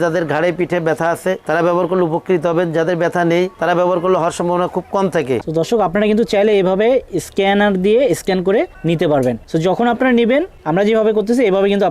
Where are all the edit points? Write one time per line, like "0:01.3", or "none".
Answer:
0:05.4
0:08.7
0:09.4
0:10.6